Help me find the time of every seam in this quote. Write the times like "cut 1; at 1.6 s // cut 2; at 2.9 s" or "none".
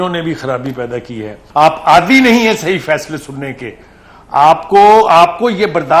cut 1; at 1.3 s